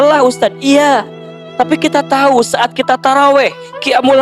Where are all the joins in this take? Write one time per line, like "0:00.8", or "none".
none